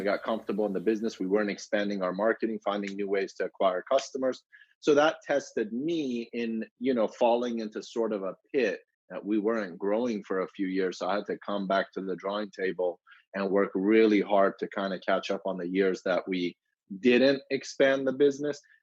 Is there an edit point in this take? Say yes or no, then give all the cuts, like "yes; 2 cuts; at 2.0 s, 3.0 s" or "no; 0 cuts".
no; 0 cuts